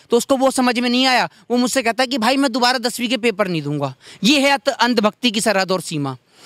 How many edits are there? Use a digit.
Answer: 0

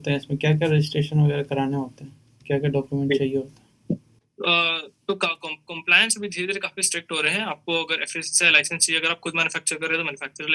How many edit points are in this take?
0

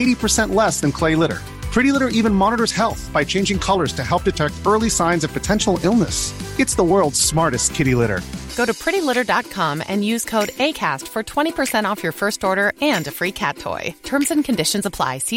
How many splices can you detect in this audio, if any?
0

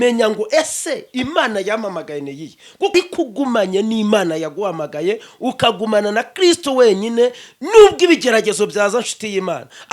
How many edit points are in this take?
1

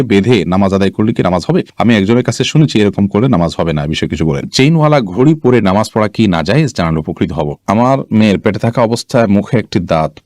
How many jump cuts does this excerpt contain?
2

